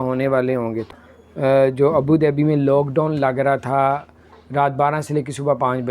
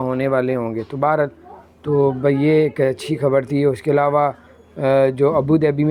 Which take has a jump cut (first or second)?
first